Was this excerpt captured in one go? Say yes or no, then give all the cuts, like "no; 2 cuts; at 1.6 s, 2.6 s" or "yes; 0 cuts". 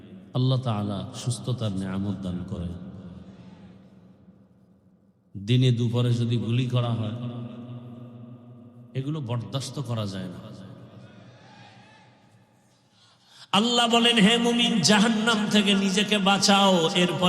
no; 2 cuts; at 5.2 s, 13.4 s